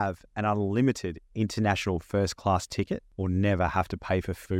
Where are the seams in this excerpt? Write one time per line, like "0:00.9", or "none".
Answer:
0:03.1